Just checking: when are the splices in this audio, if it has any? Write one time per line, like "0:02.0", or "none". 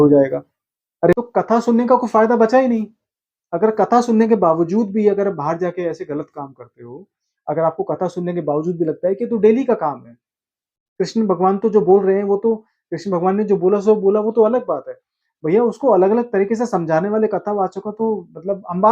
0:01.1